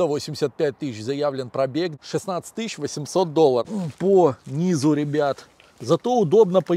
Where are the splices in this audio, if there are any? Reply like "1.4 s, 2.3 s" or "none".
2.0 s, 3.7 s